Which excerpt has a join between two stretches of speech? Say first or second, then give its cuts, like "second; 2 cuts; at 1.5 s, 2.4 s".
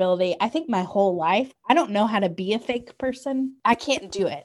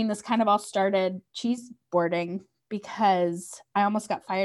first; 1 cut; at 3.5 s